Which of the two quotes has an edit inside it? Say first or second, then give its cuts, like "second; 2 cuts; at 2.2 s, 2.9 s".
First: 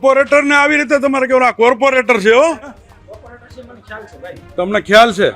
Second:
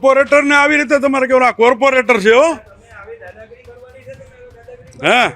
first; 1 cut; at 2.9 s